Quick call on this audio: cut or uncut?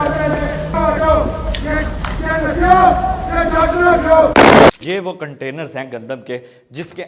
uncut